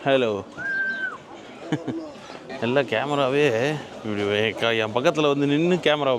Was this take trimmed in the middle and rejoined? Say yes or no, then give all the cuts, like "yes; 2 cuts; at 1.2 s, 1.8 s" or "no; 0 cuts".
no; 0 cuts